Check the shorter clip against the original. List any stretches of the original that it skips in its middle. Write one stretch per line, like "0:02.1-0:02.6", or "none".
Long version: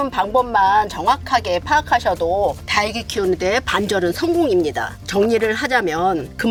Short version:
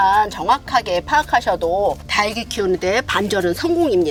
none